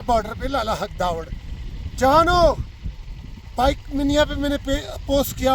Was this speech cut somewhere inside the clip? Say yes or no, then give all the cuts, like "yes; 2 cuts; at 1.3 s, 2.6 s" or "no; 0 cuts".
no; 0 cuts